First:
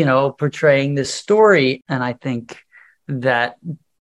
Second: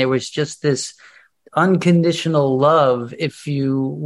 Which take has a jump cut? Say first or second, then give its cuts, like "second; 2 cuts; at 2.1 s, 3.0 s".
first; 2 cuts; at 1.2 s, 1.8 s